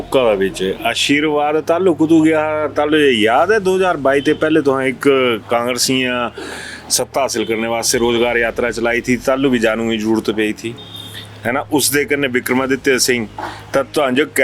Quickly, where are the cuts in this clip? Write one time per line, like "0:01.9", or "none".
none